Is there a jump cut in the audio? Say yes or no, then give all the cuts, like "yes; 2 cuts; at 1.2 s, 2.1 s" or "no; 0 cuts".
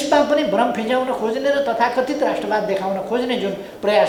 no; 0 cuts